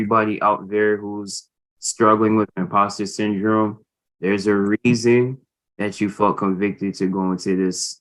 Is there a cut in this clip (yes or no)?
no